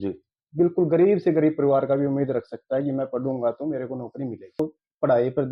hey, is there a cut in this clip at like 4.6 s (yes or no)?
yes